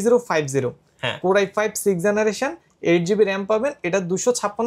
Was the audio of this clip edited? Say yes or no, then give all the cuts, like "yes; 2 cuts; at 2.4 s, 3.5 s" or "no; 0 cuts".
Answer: no; 0 cuts